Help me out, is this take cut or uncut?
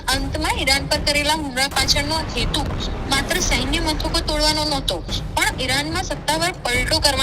uncut